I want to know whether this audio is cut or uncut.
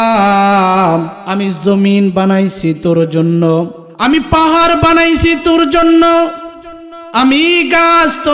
cut